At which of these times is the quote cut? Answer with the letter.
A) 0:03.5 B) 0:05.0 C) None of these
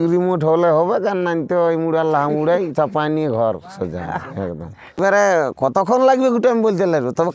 B